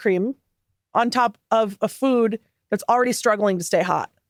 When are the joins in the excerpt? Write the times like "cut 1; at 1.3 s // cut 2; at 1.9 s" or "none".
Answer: none

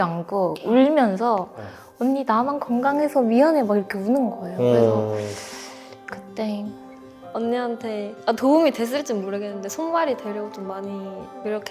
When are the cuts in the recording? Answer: cut 1; at 7.2 s

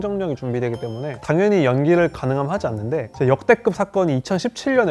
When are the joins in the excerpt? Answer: cut 1; at 3.1 s

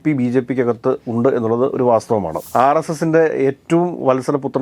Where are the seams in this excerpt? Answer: cut 1; at 2.3 s

